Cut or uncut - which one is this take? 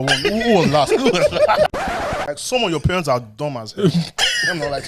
cut